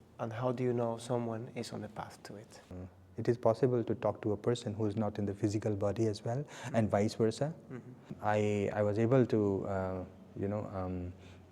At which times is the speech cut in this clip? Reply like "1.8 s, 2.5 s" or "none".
2.7 s, 8.1 s